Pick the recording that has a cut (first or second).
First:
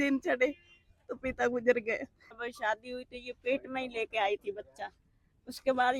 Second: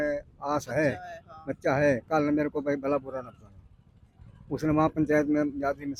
first